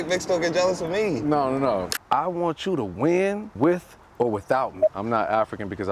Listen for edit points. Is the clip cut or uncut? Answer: cut